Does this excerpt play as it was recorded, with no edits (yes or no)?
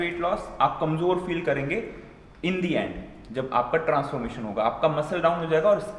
yes